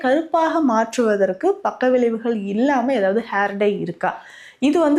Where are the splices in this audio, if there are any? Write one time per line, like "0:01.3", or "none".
none